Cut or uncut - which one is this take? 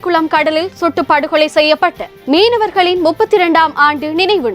uncut